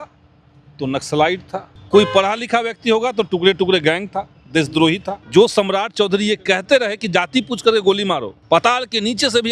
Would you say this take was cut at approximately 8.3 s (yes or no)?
yes